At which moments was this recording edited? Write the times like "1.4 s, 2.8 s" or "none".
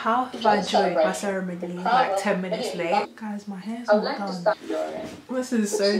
3.1 s, 4.7 s